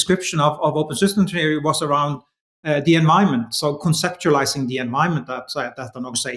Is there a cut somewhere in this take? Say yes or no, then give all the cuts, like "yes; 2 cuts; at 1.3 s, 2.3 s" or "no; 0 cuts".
no; 0 cuts